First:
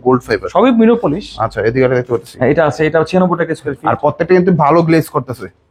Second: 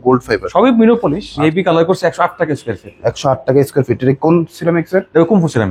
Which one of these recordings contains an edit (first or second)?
second